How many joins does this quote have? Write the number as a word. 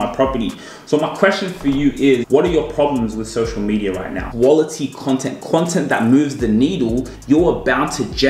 three